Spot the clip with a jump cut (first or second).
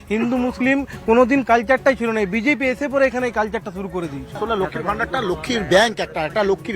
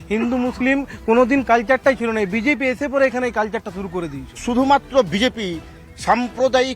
first